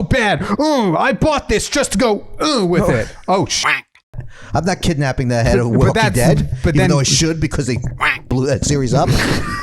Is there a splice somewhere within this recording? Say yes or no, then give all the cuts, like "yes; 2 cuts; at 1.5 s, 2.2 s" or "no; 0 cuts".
yes; 1 cut; at 4.1 s